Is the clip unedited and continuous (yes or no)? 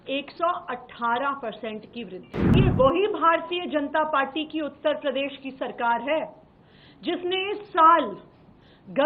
no